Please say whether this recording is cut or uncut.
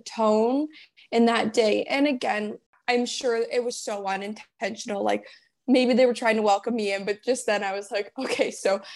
cut